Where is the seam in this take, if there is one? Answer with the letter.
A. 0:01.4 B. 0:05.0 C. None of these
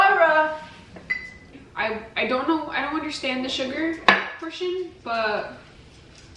A